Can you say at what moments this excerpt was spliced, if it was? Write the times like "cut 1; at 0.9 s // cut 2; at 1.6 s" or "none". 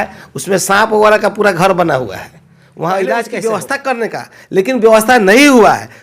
cut 1; at 3.4 s